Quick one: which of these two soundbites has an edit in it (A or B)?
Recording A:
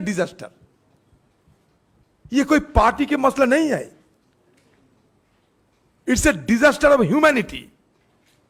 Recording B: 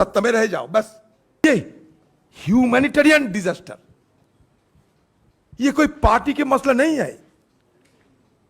B